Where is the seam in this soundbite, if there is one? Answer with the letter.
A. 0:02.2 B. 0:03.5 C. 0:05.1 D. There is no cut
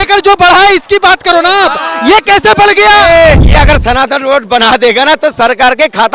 B